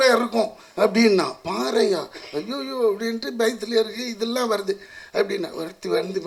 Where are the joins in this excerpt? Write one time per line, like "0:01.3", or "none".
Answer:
none